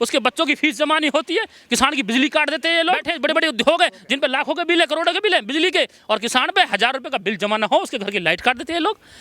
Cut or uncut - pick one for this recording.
cut